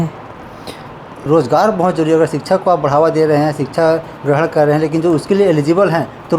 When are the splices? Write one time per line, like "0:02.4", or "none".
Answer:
0:01.1